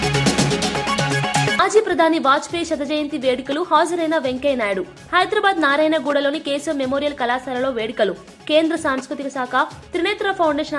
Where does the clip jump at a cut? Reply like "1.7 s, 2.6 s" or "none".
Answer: 1.5 s